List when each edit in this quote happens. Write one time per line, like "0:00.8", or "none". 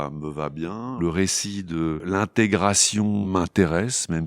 0:01.0
0:02.0
0:03.3